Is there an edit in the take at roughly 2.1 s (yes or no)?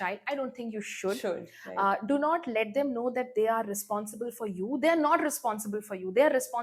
no